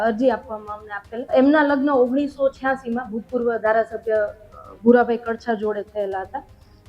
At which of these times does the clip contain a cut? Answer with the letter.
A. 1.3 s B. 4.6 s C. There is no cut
A